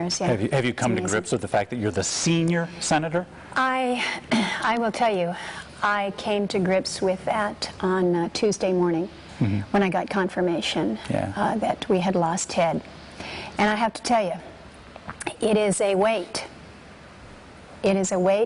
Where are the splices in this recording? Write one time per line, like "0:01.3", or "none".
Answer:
0:03.2